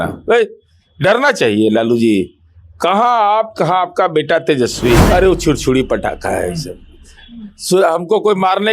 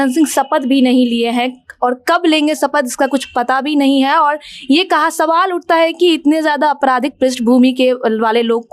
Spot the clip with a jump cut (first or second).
first